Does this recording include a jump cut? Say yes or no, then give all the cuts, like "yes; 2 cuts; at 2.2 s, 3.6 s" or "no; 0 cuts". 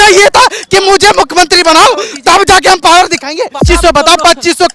yes; 1 cut; at 3.6 s